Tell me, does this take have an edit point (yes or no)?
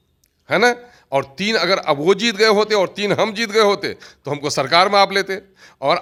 no